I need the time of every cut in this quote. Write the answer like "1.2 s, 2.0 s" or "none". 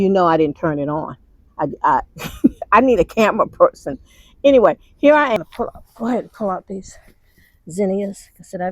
5.5 s